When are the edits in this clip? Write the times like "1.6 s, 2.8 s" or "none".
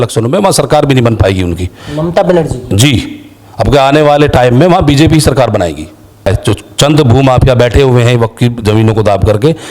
6.3 s